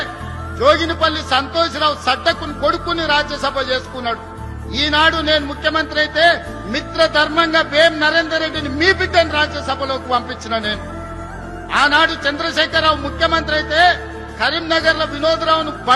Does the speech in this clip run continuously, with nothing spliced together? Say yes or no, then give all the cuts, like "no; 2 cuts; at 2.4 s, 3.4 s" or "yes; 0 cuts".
yes; 0 cuts